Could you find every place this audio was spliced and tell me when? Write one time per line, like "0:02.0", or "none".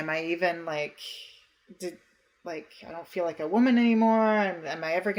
none